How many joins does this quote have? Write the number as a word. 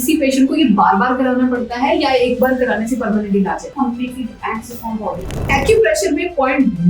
two